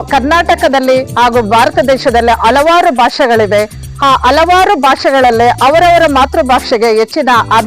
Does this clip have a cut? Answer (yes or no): no